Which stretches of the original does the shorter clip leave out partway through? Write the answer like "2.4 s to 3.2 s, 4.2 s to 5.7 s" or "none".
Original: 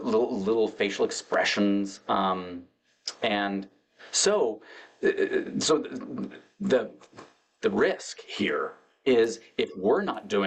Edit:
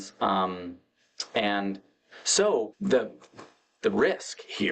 4.6 s to 6.5 s